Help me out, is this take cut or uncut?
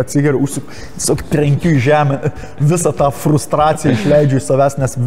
uncut